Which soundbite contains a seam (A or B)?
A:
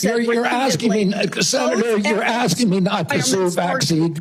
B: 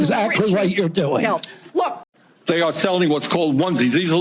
B